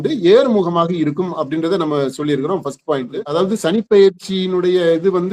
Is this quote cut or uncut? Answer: cut